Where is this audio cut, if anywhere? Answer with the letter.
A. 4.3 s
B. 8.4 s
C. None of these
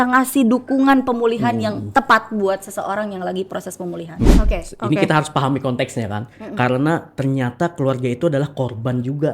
A